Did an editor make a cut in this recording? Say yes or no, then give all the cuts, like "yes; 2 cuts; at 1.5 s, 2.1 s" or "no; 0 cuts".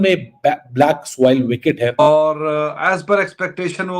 yes; 1 cut; at 2.0 s